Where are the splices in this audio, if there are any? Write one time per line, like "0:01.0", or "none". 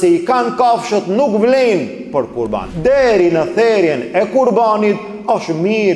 0:02.7